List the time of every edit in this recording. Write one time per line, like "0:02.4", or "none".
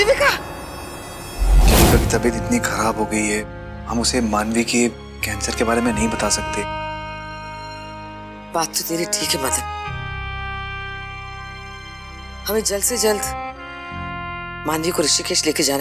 0:01.6

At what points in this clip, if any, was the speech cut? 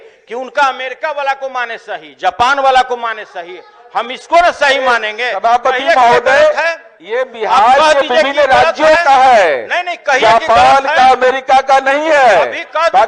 none

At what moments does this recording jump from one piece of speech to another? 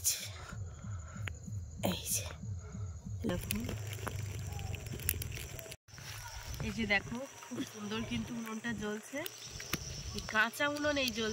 0:03.3

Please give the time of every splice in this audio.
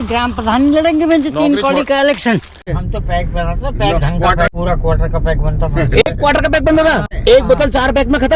0:02.7
0:04.5
0:07.1

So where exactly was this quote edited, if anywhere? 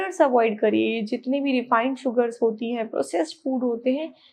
none

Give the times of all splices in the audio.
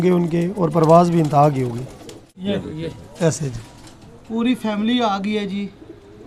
0:02.3

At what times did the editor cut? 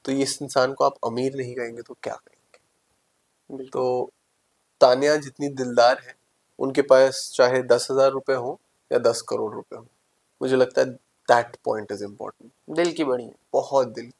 none

